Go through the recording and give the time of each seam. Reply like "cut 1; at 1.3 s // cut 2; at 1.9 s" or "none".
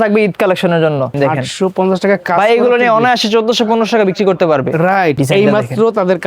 cut 1; at 1.1 s // cut 2; at 5.2 s